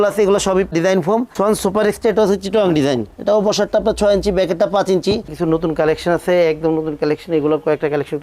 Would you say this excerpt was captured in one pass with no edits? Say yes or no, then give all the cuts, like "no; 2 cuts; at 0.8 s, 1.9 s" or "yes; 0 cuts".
no; 2 cuts; at 1.3 s, 5.3 s